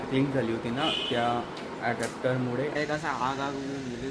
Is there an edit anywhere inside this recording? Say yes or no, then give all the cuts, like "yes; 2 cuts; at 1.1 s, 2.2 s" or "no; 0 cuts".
yes; 1 cut; at 2.8 s